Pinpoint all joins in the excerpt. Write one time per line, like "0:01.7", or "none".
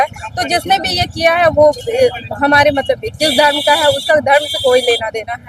none